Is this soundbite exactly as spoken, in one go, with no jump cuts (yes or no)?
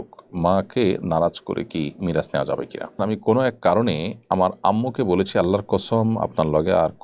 no